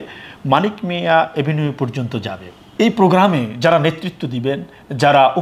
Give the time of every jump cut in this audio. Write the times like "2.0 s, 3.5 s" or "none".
2.7 s